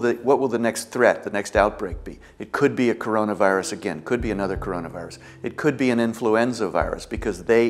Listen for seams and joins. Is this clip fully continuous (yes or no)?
yes